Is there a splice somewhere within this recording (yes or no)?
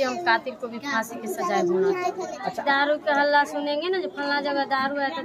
yes